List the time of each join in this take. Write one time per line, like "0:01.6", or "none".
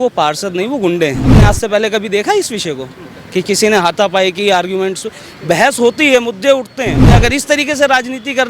0:01.3
0:07.1